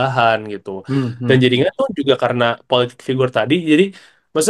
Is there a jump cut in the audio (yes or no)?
no